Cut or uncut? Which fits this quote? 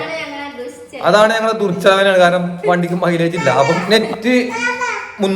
cut